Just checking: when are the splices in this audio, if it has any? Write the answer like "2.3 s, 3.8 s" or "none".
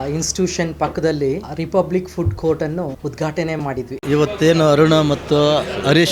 1.5 s, 3.0 s, 4.0 s